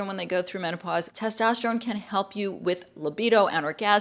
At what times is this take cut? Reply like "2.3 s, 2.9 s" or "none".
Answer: 1.1 s